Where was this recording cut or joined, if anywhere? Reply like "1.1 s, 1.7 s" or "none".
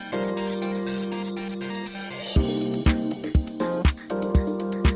3.9 s